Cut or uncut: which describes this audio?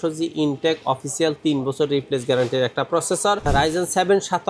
cut